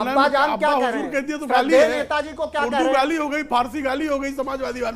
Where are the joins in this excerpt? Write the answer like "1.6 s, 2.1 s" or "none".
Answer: none

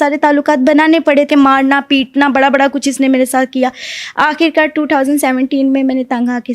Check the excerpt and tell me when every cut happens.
1.3 s

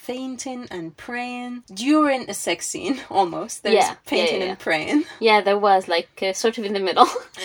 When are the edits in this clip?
1.7 s

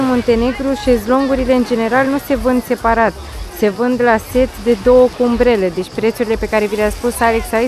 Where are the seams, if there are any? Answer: none

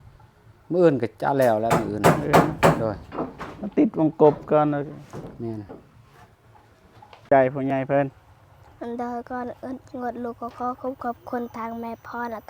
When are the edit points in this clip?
7.2 s

